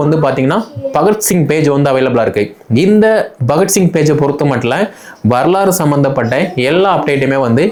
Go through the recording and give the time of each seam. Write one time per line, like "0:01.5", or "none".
none